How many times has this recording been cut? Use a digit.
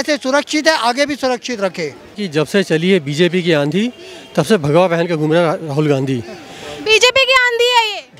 1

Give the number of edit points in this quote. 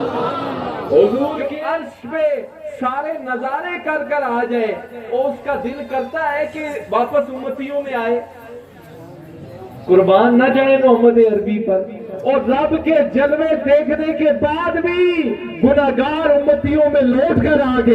1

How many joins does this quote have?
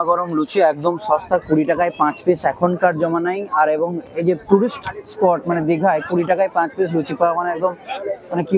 0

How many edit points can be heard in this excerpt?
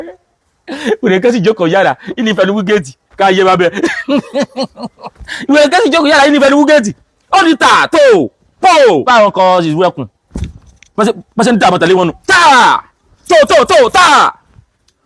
1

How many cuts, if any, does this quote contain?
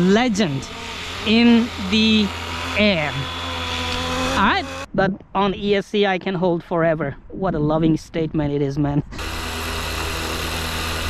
2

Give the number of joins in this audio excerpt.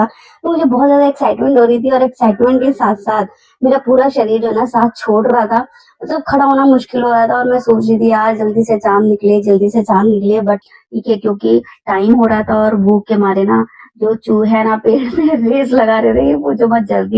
1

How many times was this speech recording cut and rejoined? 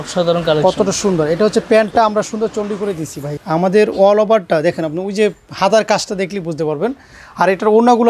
1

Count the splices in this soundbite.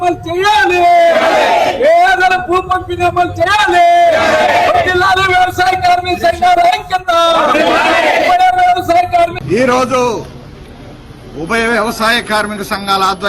1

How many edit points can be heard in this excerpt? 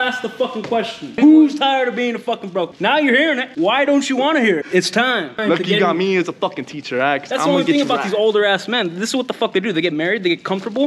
4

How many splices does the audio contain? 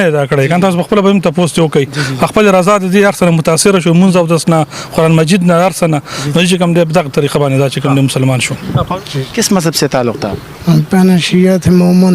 1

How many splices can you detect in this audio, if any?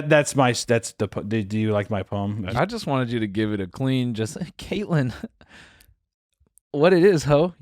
1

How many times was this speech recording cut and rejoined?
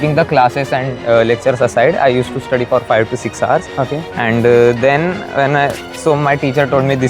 0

